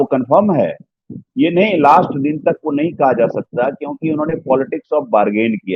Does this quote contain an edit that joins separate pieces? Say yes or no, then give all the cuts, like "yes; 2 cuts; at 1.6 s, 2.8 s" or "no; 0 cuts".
no; 0 cuts